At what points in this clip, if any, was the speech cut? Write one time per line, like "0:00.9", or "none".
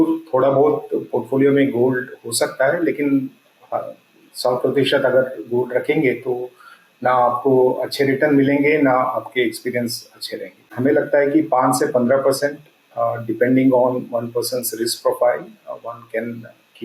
0:10.7

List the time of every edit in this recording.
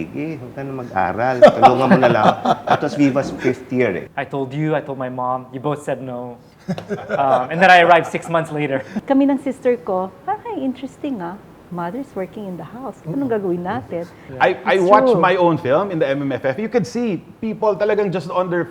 0:04.0
0:08.9
0:14.2

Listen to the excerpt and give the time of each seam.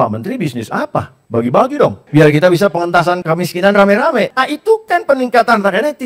0:01.2
0:02.0
0:03.2
0:04.3

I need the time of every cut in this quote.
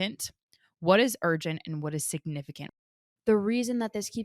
0:02.8

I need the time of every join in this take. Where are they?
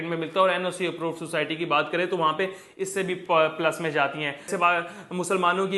0:04.5

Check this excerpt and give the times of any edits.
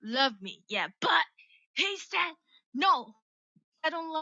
none

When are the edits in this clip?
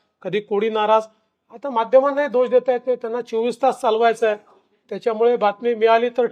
none

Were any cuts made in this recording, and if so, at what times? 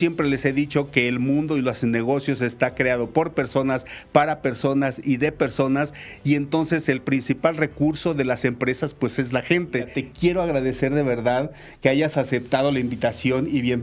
0:10.0

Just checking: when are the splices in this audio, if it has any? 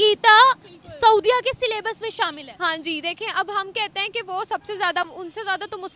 none

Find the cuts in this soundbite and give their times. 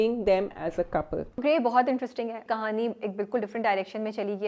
0:01.3
0:02.4

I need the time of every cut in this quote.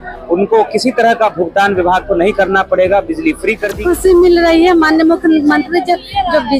0:03.7

